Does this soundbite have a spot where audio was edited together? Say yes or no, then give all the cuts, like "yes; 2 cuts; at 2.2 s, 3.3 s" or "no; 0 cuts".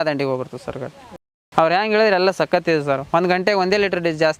no; 0 cuts